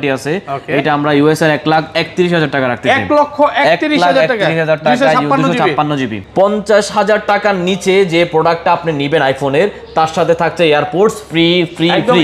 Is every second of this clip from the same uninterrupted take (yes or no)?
no